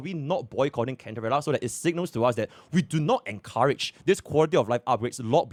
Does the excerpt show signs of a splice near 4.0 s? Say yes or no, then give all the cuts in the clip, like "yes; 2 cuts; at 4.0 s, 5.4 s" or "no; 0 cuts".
no; 0 cuts